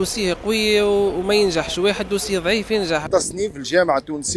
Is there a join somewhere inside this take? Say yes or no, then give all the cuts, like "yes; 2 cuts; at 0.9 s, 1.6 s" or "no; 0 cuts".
yes; 1 cut; at 3.1 s